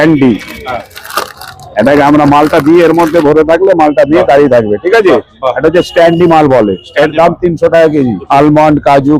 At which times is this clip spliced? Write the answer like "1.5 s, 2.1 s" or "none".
8.2 s